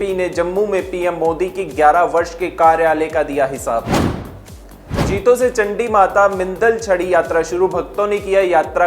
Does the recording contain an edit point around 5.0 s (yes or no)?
yes